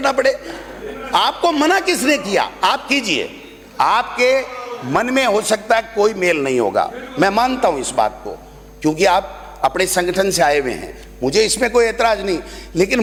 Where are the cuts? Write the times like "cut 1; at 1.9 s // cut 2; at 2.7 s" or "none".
none

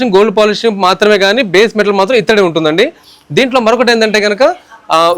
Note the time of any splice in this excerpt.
none

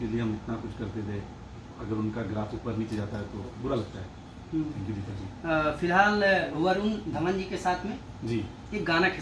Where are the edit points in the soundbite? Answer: none

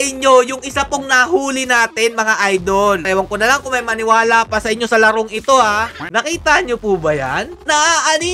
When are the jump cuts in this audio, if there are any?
cut 1; at 3.1 s // cut 2; at 6.0 s

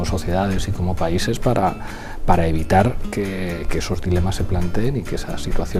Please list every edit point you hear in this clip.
none

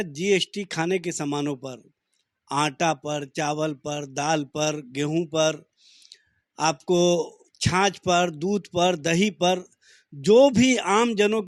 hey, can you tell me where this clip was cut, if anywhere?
none

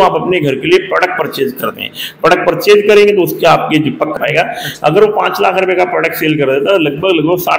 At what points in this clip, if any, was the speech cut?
cut 1; at 4.1 s

